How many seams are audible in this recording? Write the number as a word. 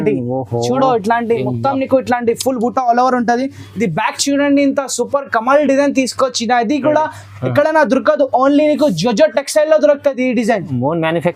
zero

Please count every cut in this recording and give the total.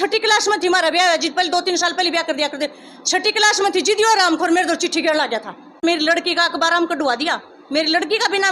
one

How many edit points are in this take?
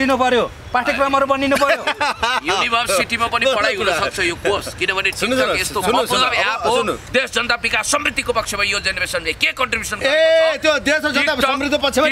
one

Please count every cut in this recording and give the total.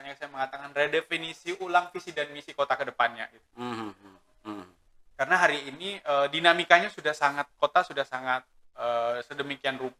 zero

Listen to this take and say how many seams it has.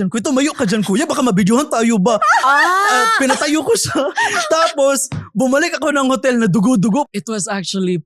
one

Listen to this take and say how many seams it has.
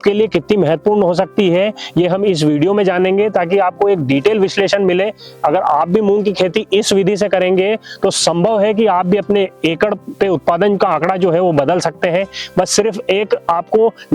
zero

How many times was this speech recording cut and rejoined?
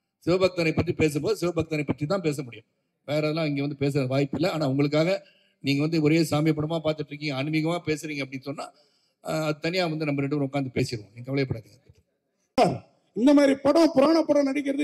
one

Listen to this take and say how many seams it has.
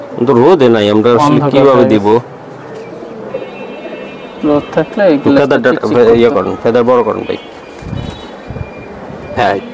zero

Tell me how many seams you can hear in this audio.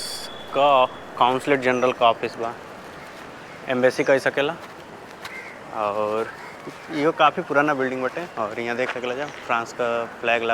zero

